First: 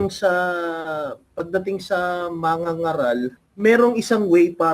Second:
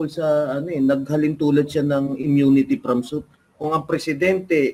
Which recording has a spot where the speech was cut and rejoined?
first; 1 cut; at 3.4 s

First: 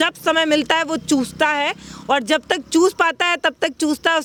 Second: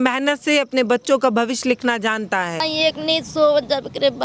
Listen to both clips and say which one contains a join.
second; 1 cut; at 2.6 s

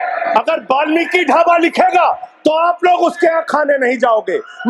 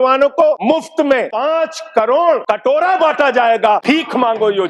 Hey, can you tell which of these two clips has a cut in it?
second; 3 cuts; at 0.9 s, 2.4 s, 3.8 s

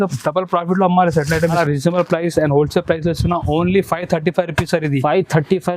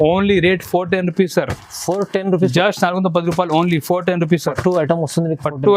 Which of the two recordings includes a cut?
first; 1 cut; at 1.6 s

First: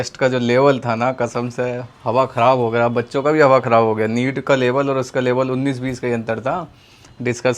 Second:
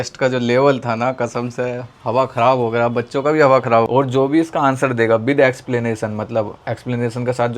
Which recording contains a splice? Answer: second; 1 cut; at 3.9 s

